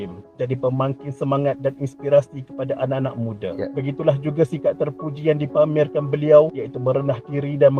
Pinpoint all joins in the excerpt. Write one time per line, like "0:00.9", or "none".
none